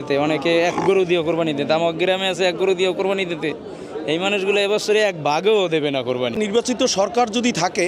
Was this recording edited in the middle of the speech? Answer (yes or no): yes